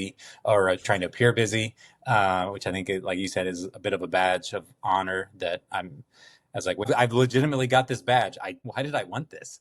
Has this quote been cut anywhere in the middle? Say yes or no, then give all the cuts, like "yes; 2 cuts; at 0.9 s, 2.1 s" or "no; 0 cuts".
yes; 2 cuts; at 6.9 s, 8.6 s